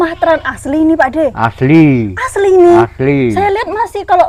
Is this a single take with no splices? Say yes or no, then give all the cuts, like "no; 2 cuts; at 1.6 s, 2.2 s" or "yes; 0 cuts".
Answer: yes; 0 cuts